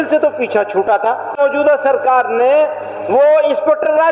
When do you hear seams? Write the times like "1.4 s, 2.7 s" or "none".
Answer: 1.4 s